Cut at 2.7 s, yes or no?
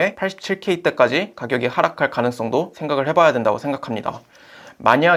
no